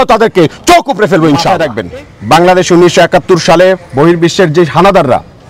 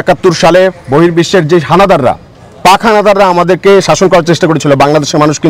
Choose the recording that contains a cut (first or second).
first